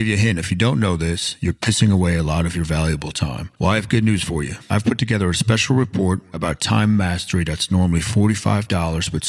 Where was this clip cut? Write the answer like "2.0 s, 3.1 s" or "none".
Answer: none

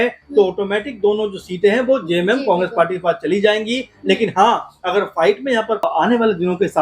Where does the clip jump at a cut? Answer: 5.8 s

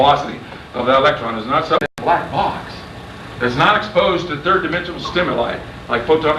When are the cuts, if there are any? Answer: none

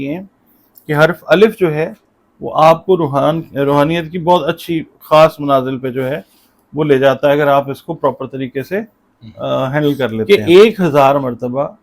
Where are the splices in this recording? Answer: 10.3 s

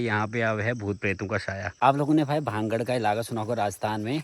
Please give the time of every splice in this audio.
1.7 s

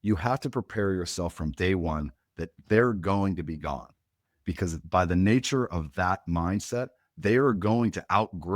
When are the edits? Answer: 4.8 s

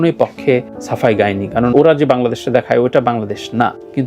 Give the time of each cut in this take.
1.7 s

